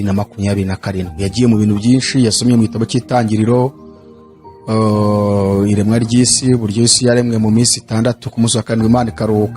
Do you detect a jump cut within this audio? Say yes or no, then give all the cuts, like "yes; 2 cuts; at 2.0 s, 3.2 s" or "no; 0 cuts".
no; 0 cuts